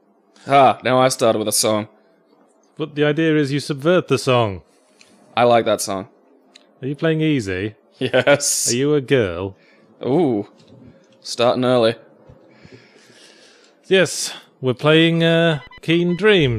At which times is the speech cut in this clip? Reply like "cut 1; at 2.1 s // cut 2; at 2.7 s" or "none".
none